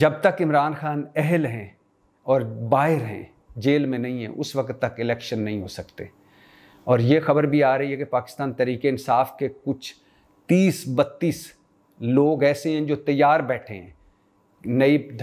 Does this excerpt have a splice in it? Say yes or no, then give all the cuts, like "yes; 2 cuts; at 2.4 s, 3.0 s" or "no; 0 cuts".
no; 0 cuts